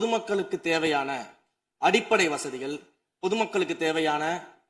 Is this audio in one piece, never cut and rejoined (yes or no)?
yes